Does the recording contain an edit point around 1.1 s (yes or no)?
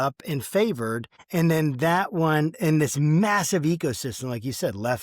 yes